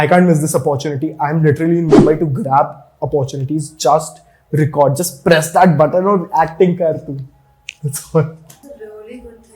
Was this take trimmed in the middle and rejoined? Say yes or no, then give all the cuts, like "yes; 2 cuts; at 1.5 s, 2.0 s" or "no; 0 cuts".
yes; 1 cut; at 8.5 s